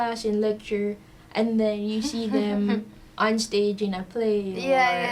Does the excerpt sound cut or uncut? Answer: uncut